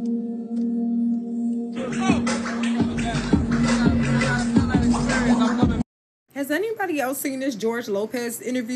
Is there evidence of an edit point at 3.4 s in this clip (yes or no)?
no